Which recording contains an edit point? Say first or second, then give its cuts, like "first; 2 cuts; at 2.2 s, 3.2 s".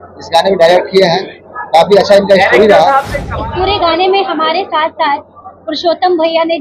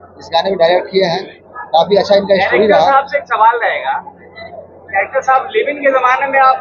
first; 1 cut; at 3.2 s